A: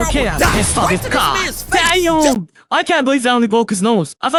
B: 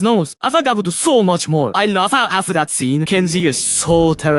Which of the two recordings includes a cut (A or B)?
B